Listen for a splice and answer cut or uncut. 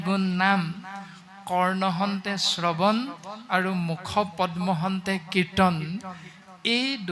uncut